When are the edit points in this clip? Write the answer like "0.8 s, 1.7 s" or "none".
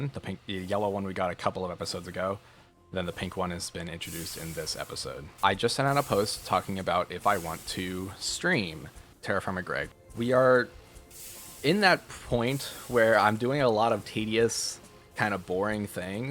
5.2 s, 9.9 s